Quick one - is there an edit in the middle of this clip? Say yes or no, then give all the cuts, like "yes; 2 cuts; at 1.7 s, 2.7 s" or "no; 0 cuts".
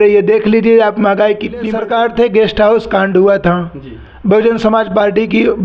yes; 1 cut; at 1.7 s